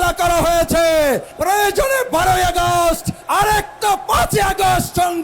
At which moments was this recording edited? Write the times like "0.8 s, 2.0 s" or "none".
1.3 s, 3.1 s